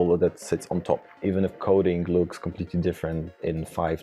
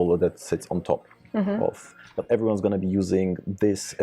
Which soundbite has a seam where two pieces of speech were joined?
first; 1 cut; at 1.1 s

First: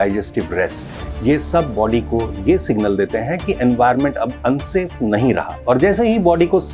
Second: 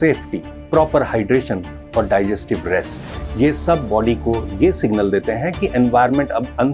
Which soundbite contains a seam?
first; 1 cut; at 5.5 s

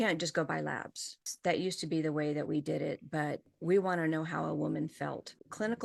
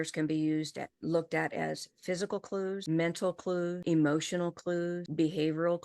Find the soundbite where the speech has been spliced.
second; 3 cuts; at 2.8 s, 3.8 s, 5.0 s

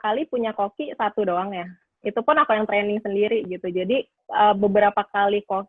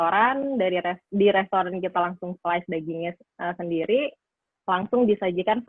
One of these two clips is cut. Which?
first; 1 cut; at 4.2 s

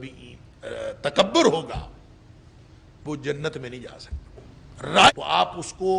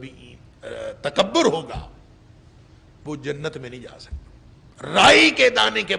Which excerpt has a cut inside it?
first; 1 cut; at 5.1 s

